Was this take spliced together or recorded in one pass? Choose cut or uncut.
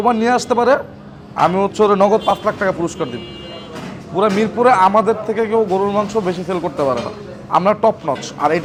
uncut